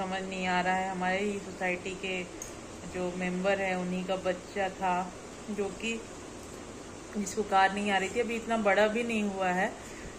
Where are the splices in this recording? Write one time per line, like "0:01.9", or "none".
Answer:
none